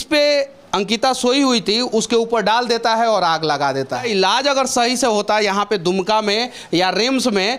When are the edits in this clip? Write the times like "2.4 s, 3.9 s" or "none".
4.0 s